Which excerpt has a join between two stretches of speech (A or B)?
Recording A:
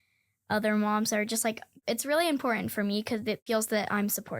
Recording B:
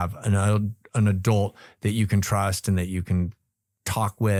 A